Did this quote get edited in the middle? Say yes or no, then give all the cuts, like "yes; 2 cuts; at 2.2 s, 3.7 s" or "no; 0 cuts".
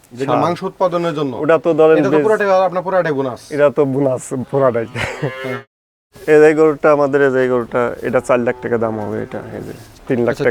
yes; 1 cut; at 5.6 s